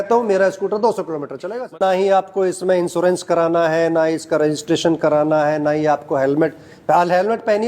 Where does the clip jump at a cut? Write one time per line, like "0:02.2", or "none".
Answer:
0:01.7